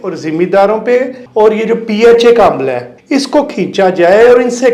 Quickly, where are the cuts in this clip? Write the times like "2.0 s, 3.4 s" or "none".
1.2 s, 2.9 s